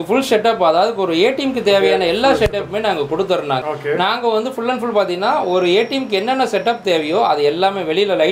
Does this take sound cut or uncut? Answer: cut